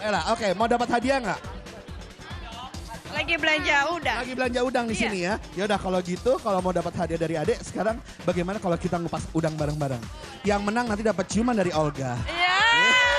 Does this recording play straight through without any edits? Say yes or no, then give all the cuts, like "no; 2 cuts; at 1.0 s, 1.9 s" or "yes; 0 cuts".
yes; 0 cuts